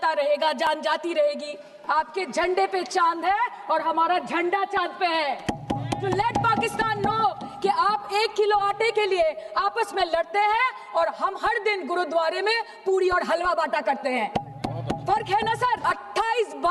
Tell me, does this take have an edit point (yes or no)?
yes